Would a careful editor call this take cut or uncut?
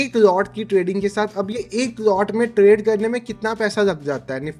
uncut